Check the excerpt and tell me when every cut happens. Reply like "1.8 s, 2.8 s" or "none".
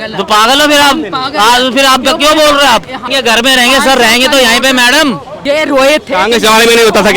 3.1 s, 5.4 s